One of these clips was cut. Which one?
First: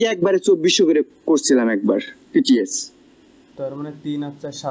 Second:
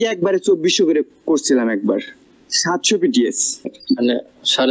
second; 2 cuts; at 2.2 s, 3.8 s

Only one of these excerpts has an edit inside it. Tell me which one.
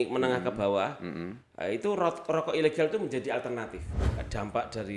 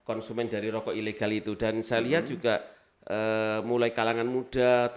first; 1 cut; at 3.9 s

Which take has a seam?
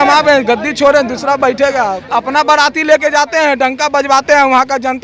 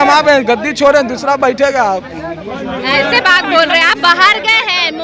first; 1 cut; at 2.0 s

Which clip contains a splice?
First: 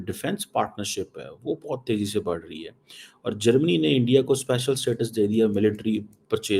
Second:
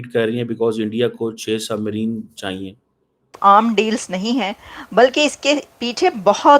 second; 1 cut; at 3.4 s

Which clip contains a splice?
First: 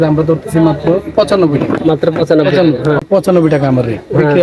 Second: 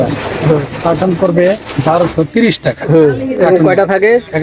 first; 1 cut; at 3.0 s

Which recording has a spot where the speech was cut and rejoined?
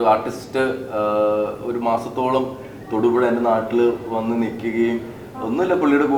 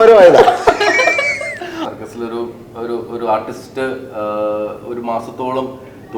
second; 1 cut; at 1.8 s

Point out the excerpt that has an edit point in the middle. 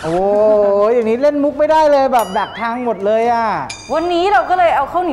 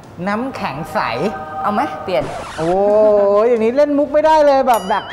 first; 1 cut; at 3.8 s

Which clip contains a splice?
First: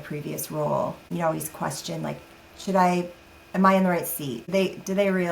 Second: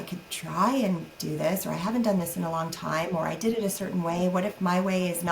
first; 2 cuts; at 1.1 s, 4.4 s

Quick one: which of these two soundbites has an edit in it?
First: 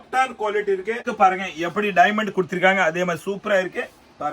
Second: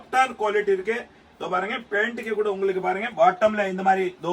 first; 1 cut; at 1.1 s

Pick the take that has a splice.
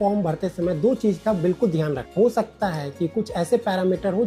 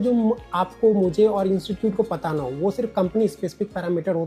first; 1 cut; at 2.1 s

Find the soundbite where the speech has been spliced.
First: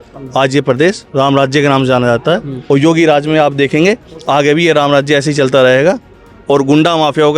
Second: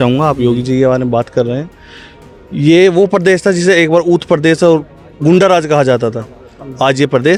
first; 1 cut; at 2.5 s

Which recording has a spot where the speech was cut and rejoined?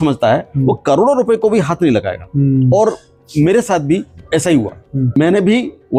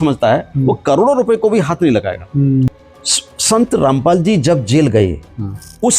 second; 1 cut; at 2.7 s

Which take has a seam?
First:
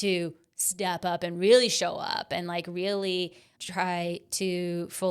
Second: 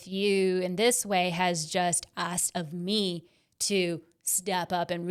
first; 1 cut; at 3.5 s

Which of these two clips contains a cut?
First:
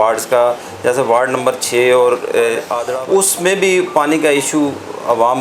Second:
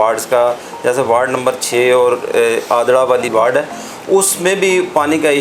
first; 1 cut; at 2.8 s

